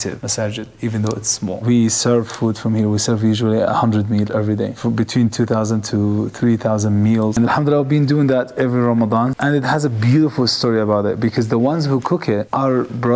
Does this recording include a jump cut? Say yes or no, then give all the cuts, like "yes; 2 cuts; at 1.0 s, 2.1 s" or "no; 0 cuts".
yes; 3 cuts; at 1.6 s, 7.3 s, 9.4 s